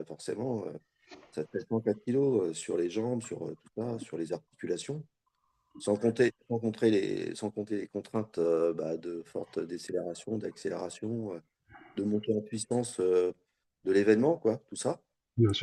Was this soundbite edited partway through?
no; 0 cuts

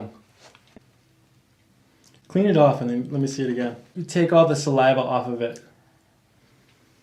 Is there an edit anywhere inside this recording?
yes; 1 cut; at 4.0 s

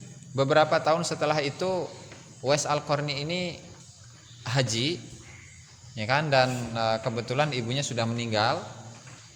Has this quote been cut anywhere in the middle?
no; 0 cuts

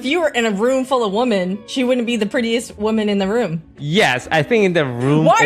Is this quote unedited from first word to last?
no; 3 cuts; at 1.6 s, 2.7 s, 3.8 s

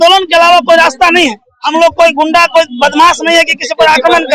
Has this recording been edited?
no; 0 cuts

